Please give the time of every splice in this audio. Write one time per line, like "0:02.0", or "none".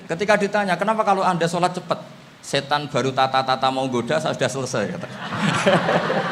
none